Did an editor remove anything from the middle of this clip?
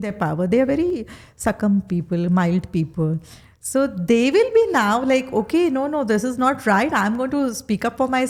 no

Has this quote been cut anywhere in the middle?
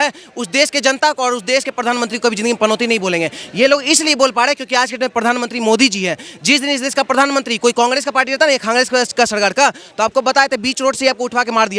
no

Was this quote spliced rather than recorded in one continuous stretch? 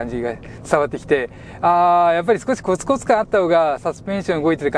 no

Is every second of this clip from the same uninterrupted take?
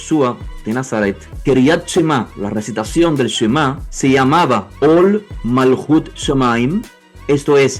no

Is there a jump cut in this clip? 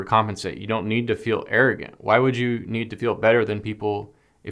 no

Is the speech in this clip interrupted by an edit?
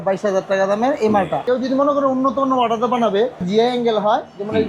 yes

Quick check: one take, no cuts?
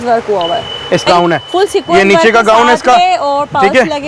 no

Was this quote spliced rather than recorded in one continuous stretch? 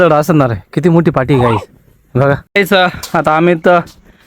yes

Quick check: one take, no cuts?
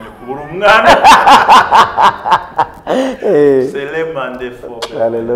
yes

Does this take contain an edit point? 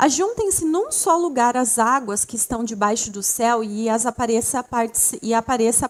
no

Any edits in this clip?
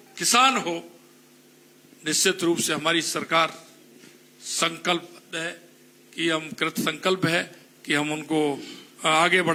no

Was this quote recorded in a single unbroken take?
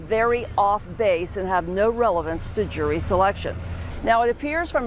no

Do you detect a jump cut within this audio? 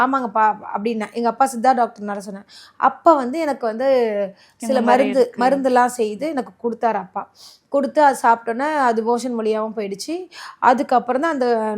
no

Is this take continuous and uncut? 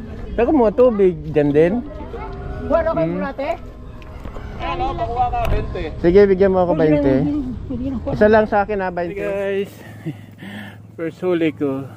no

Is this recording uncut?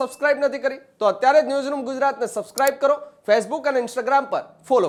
yes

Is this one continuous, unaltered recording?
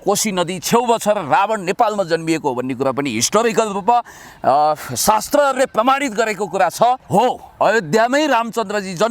no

